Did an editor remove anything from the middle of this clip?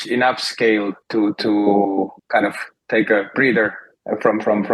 yes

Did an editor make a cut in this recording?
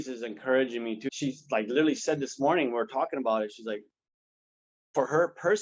yes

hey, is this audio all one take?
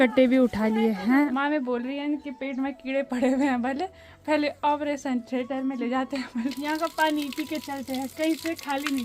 no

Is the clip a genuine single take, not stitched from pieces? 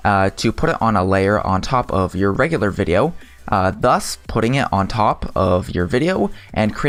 yes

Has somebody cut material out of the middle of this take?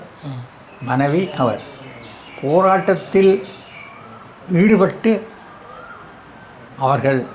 no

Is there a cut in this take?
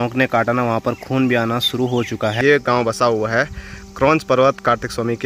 yes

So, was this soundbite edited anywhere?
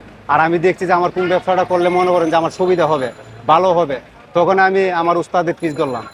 no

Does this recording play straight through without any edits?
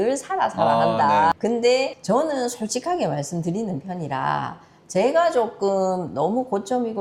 yes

